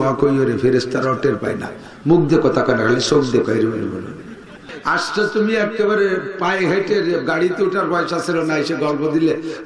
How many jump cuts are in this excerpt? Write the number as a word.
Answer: one